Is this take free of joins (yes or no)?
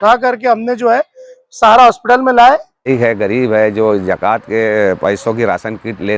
no